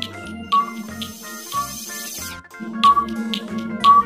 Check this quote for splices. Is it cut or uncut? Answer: cut